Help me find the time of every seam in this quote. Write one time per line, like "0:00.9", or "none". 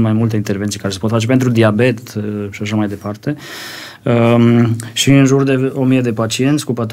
none